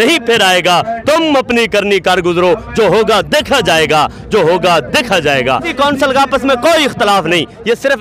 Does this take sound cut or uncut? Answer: cut